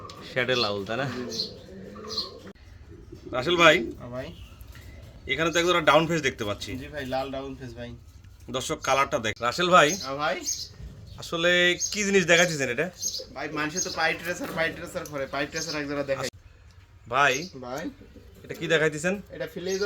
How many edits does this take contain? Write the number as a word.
three